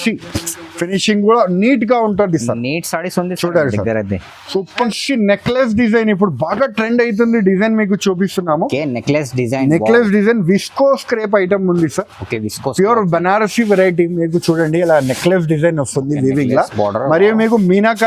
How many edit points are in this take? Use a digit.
1